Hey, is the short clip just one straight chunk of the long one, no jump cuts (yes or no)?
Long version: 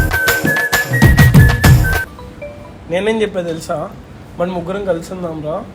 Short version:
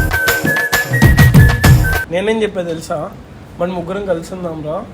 no